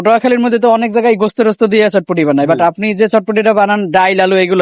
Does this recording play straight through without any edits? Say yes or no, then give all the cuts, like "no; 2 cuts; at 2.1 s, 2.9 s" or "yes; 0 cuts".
yes; 0 cuts